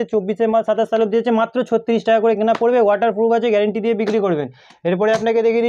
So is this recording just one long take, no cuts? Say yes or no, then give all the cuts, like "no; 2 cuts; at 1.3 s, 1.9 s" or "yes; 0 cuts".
yes; 0 cuts